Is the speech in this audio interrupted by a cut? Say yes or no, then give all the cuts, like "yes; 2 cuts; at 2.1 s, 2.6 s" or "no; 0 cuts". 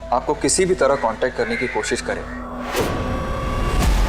yes; 1 cut; at 2.4 s